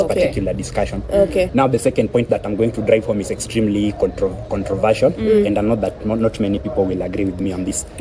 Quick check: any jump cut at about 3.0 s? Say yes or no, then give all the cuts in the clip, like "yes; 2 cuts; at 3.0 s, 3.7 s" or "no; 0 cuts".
no; 1 cut; at 1.5 s